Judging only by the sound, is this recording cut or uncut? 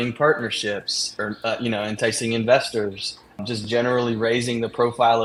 uncut